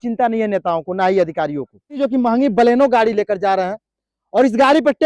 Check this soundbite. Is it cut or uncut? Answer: cut